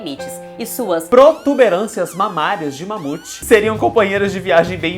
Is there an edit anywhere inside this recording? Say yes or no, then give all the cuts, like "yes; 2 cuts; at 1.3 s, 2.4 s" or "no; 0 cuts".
yes; 1 cut; at 3.4 s